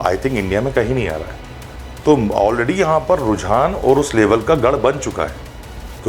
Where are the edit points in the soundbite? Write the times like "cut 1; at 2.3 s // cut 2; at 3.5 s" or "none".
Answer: none